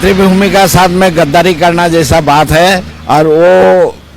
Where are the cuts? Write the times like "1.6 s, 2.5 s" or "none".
2.9 s